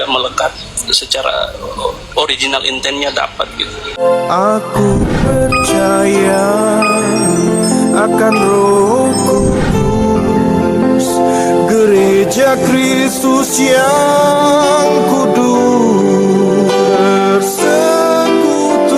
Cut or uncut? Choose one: cut